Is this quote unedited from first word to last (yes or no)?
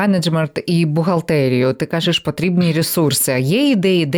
yes